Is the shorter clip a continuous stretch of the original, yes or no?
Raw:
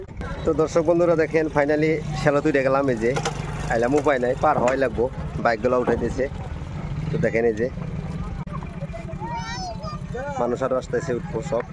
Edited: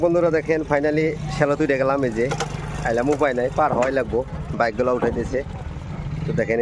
yes